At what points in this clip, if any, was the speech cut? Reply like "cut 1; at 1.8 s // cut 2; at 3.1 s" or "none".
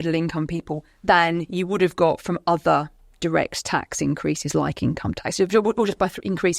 none